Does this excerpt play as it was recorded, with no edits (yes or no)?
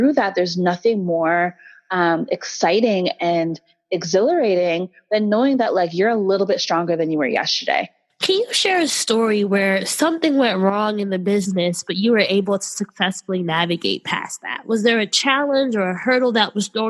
yes